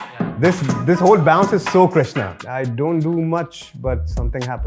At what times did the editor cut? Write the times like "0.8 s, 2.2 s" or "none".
2.4 s

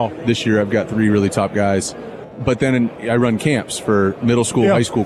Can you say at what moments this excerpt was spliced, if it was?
2.2 s, 3.4 s

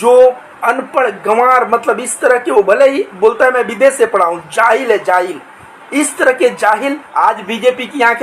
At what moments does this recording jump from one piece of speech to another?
7.0 s

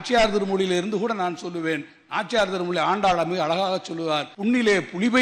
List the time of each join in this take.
4.3 s

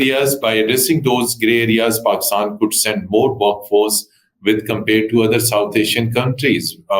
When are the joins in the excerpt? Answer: none

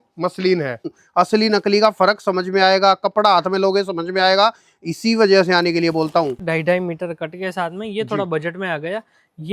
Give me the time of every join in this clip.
0.9 s, 6.4 s

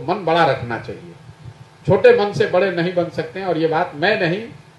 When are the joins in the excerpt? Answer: none

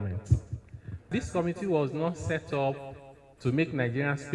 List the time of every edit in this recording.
1.0 s

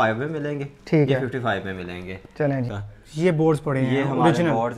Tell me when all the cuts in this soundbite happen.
2.7 s

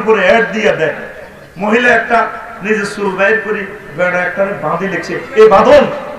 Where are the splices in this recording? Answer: none

